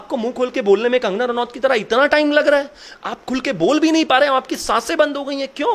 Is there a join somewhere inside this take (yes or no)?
no